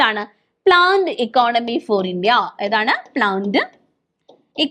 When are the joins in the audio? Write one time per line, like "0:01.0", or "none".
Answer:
none